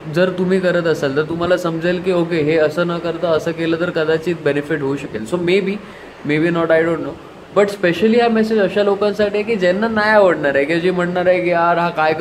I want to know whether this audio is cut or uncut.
uncut